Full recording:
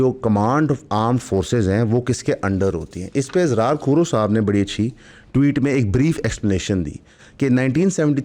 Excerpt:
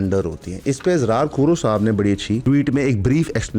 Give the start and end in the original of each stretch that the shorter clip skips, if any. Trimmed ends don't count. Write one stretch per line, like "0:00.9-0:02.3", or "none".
0:04.9-0:05.3